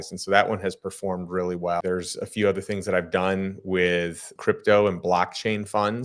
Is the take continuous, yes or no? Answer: no